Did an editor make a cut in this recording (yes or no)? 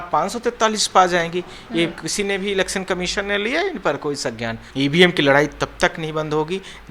yes